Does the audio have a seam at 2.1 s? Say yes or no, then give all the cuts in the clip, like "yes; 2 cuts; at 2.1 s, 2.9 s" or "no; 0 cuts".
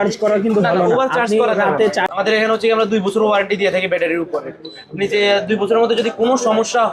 yes; 1 cut; at 2.1 s